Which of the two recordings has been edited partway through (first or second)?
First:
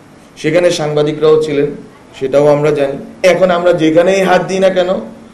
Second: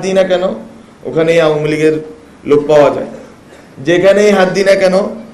first